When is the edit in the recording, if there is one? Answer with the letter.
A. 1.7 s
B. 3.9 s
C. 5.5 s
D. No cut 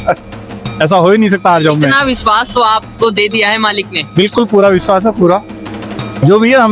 D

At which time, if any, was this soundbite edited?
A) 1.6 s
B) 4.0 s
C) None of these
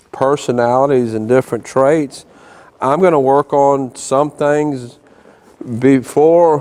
C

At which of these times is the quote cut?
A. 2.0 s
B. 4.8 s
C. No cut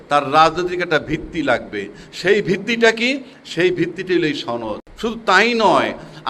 B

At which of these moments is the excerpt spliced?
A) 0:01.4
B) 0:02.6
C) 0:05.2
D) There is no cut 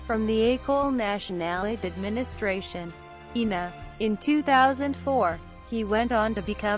C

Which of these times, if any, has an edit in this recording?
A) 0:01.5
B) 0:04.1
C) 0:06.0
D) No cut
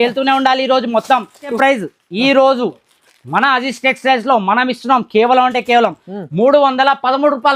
A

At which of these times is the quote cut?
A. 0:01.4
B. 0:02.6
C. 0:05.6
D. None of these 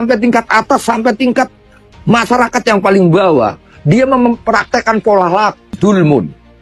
C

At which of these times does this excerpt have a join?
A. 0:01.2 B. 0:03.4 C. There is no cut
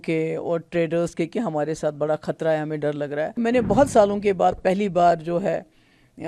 B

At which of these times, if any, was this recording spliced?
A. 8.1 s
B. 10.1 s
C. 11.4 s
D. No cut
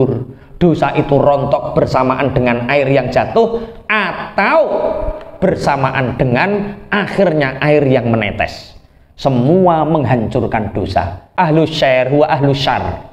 C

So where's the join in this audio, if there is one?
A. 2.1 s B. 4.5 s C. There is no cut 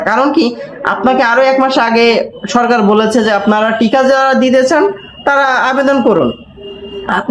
C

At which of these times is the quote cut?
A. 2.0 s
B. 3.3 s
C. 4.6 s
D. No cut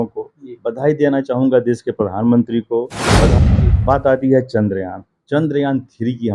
B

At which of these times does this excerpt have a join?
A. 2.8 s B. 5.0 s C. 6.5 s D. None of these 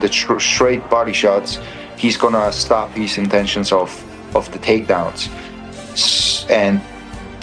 D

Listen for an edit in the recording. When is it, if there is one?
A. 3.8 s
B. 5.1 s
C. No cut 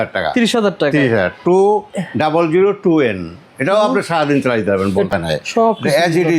B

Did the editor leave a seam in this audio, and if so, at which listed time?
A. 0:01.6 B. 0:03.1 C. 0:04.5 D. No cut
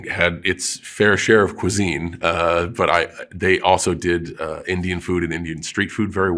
D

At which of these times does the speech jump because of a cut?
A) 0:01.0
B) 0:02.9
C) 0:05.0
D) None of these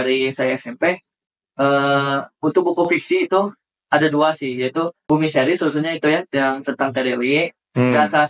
C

